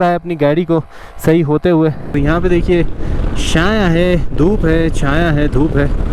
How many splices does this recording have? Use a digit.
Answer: 1